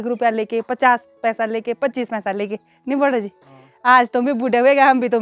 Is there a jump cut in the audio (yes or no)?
no